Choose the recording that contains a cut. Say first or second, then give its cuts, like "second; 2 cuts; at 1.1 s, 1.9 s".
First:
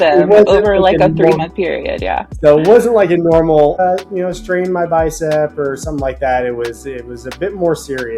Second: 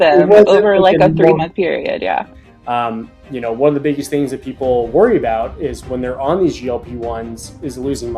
second; 1 cut; at 2.3 s